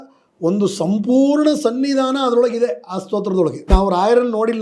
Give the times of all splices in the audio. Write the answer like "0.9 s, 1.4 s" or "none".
3.7 s